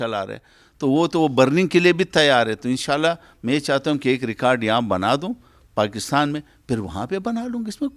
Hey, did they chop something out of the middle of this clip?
no; 0 cuts

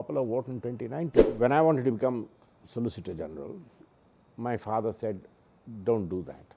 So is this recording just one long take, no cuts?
no; 1 cut; at 1.3 s

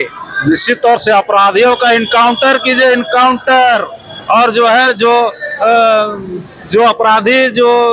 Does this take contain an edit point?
no; 0 cuts

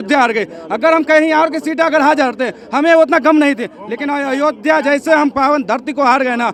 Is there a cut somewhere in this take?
no; 0 cuts

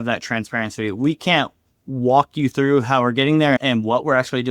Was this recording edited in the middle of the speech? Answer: yes; 1 cut; at 3.6 s

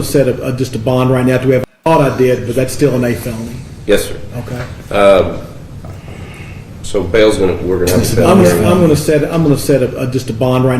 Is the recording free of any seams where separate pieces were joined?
no; 1 cut; at 1.8 s

